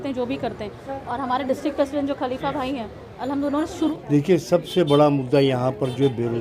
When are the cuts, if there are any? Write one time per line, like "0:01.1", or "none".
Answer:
0:03.9